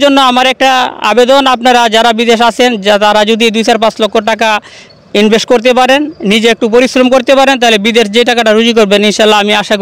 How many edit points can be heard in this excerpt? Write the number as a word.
zero